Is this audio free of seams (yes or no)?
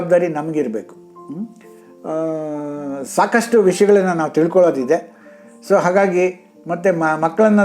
yes